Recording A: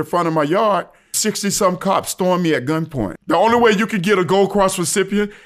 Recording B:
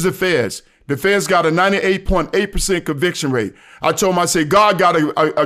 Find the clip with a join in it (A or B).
A